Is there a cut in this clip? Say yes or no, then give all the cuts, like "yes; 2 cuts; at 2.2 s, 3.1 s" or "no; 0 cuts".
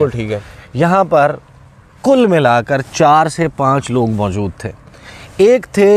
no; 0 cuts